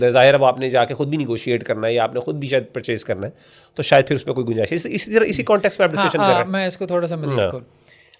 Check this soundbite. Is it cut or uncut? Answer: uncut